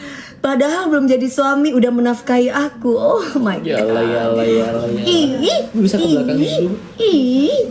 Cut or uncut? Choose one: uncut